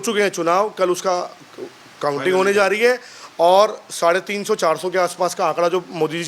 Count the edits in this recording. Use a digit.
0